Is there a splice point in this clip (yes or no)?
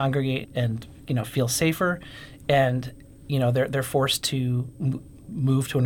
no